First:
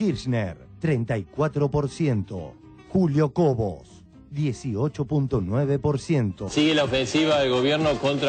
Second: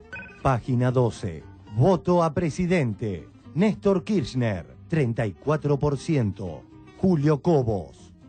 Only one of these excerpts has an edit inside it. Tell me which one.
first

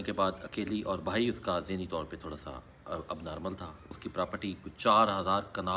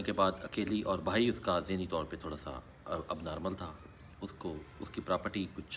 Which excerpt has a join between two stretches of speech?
first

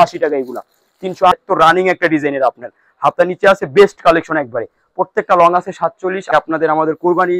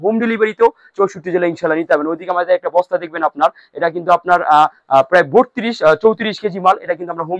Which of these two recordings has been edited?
first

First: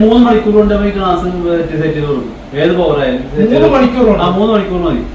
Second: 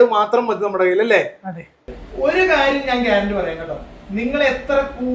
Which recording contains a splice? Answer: second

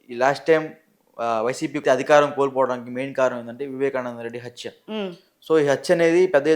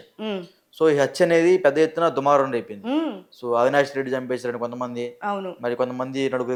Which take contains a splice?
first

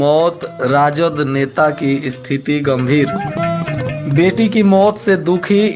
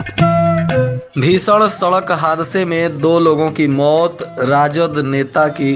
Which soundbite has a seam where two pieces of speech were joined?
second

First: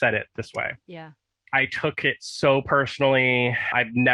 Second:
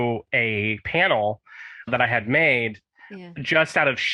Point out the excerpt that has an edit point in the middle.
first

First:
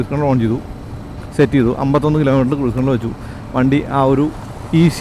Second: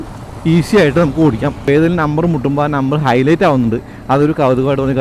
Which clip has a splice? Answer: second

